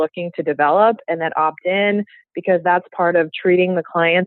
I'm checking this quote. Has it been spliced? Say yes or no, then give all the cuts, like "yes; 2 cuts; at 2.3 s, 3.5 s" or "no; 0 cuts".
no; 0 cuts